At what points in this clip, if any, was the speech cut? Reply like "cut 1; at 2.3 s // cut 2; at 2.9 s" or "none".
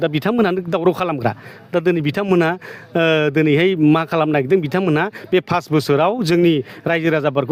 none